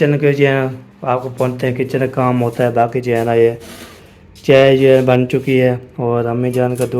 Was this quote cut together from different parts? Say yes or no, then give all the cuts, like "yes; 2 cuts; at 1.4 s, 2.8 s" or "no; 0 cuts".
no; 0 cuts